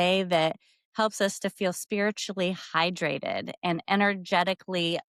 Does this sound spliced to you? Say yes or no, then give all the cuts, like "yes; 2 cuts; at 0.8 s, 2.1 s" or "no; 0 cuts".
no; 0 cuts